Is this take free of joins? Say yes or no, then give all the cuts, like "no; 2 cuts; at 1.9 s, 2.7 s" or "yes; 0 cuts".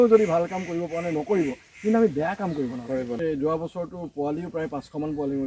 no; 1 cut; at 3.2 s